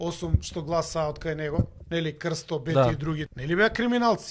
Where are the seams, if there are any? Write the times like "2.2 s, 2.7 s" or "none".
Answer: 1.8 s, 3.3 s